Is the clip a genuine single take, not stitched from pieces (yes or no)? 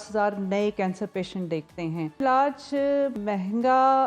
no